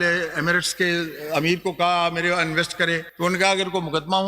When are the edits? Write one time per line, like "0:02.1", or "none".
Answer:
0:03.1

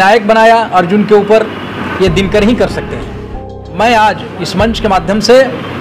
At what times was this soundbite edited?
0:03.4

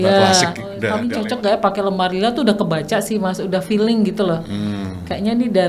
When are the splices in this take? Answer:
0:00.9

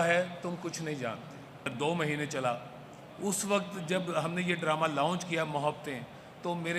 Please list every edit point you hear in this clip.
0:01.7

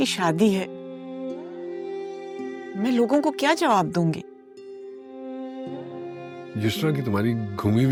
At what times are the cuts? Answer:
none

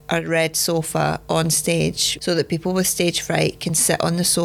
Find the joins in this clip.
0:02.1

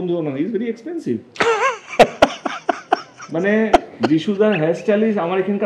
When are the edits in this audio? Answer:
none

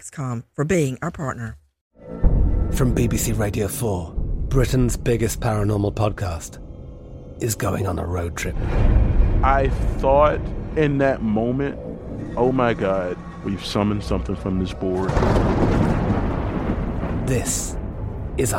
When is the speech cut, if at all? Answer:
0:01.8

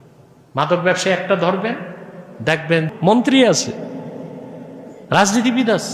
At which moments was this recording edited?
0:02.9

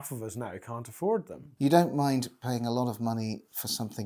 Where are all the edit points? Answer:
0:01.3

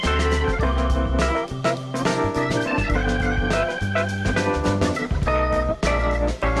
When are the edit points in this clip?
0:02.9

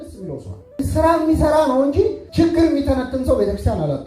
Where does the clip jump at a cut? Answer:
0:00.8
0:02.2

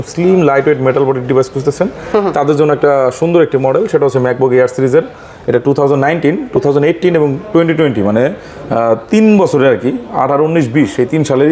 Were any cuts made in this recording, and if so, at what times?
none

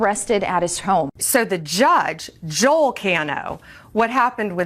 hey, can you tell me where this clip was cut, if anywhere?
0:01.2

